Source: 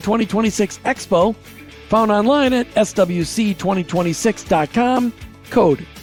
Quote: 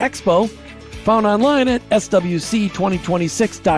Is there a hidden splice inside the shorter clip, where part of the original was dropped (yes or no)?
no